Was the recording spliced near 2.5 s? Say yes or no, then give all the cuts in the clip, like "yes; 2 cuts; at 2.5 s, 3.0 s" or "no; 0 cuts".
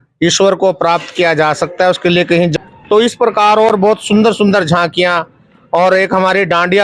yes; 1 cut; at 2.5 s